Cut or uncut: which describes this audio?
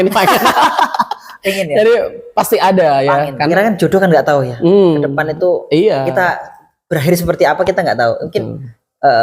cut